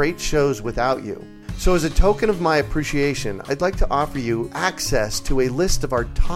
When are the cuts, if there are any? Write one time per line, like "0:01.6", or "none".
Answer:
none